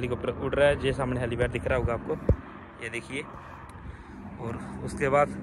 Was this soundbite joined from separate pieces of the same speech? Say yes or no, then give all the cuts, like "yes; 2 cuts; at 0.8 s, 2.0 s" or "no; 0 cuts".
no; 0 cuts